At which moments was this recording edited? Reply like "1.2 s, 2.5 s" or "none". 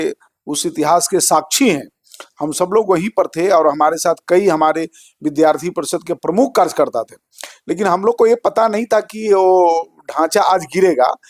none